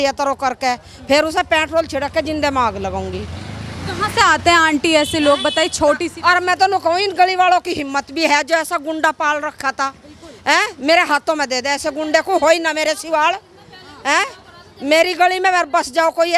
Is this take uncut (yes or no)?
yes